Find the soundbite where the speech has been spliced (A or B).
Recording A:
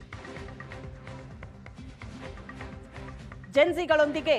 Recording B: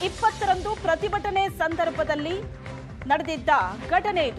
A